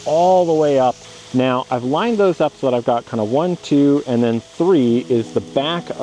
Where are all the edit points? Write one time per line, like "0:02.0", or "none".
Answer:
0:01.0